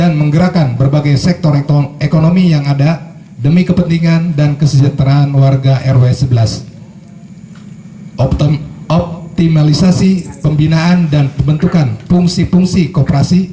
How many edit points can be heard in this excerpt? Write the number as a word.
zero